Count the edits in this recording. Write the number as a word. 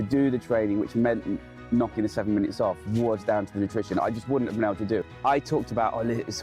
one